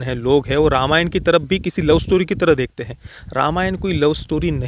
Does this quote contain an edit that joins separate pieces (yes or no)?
no